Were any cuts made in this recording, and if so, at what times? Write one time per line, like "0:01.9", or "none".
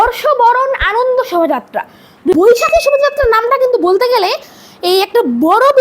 0:02.4